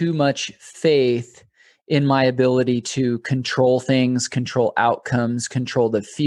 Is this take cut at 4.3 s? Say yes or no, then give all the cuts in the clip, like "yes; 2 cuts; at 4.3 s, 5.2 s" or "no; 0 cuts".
no; 0 cuts